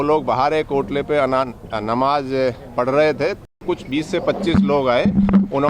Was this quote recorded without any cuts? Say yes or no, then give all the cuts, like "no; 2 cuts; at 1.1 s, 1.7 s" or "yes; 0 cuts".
no; 1 cut; at 3.6 s